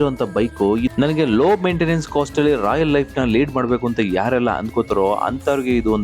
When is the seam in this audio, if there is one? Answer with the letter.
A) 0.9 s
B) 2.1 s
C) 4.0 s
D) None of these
A